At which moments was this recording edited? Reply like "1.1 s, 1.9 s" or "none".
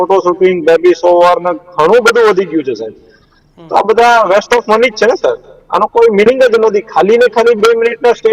none

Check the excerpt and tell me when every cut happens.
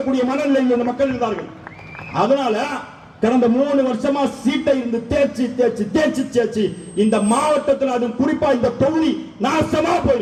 none

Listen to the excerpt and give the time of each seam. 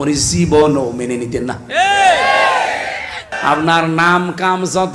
3.3 s

